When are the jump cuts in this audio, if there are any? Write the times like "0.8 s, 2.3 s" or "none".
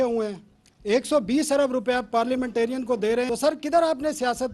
3.3 s

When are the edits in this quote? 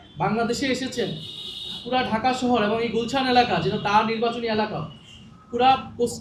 none

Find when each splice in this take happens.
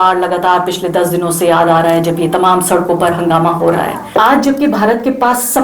4.0 s

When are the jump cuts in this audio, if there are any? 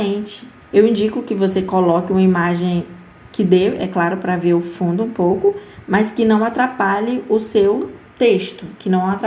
8.0 s

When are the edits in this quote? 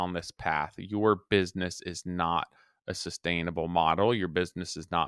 none

